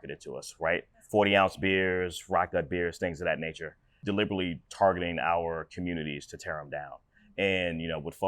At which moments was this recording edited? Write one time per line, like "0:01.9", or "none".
0:00.9
0:04.0